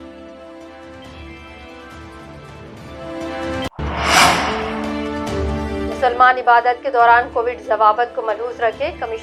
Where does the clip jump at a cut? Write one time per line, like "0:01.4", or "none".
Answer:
0:00.9